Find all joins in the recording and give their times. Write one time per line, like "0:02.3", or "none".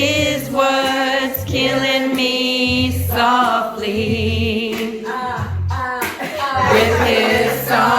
0:01.1